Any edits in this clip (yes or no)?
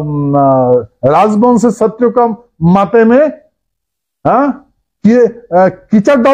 no